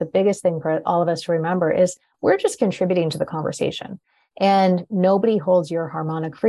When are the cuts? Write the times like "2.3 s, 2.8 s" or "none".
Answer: 3.9 s